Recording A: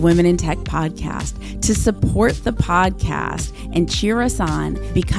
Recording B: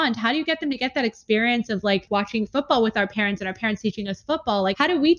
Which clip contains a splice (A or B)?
B